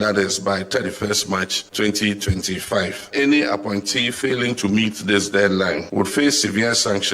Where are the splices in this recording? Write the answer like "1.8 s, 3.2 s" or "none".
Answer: 1.6 s, 3.1 s, 5.8 s

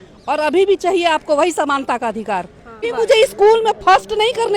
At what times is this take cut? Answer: 2.8 s

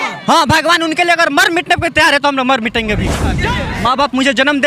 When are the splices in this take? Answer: 3.4 s

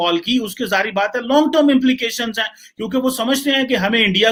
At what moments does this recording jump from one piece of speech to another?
none

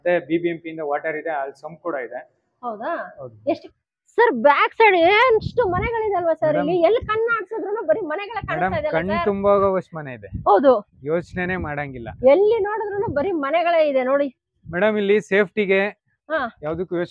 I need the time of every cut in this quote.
3.7 s

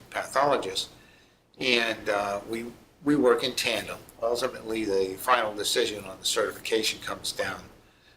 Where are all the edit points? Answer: 4.8 s

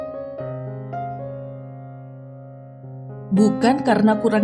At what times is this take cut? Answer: 3.3 s

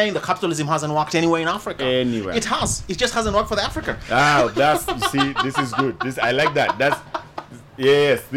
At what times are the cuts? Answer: none

